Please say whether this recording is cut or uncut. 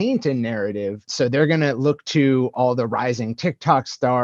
cut